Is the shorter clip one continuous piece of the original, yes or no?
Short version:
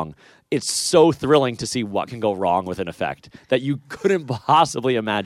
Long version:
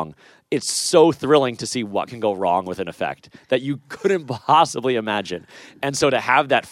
yes